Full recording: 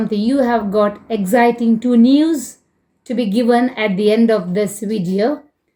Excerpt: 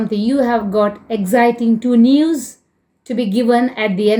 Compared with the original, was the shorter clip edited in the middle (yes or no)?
no